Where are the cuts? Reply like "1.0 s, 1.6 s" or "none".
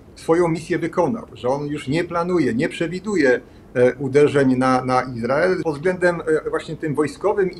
5.6 s